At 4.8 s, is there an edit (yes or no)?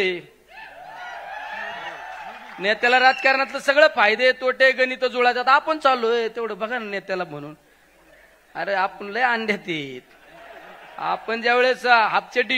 no